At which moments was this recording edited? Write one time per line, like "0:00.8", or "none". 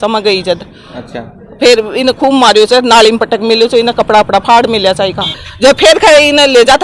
0:05.4